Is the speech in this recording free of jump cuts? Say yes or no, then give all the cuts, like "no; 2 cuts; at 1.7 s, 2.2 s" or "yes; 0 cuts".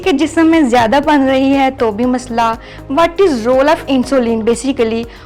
yes; 0 cuts